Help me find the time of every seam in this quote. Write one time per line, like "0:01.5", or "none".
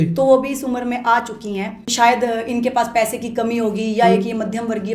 0:01.9